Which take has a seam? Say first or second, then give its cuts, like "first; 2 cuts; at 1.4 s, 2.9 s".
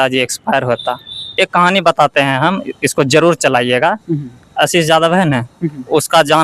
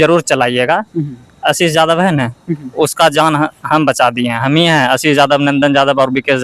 first; 1 cut; at 1.2 s